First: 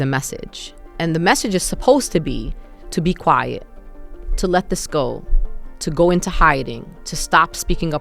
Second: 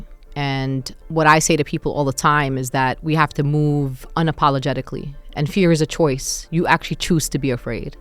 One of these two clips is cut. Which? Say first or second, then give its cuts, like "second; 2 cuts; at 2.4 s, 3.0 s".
second; 1 cut; at 1.0 s